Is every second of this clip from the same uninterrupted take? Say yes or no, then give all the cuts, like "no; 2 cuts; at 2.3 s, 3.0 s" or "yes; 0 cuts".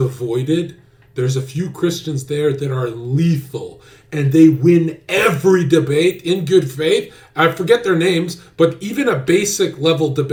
yes; 0 cuts